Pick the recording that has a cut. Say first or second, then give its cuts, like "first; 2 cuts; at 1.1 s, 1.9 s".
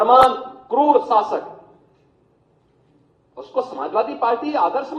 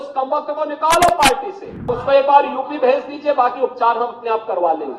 second; 1 cut; at 2.0 s